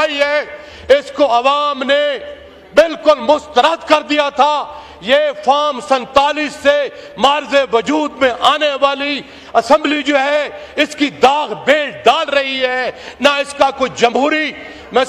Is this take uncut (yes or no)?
yes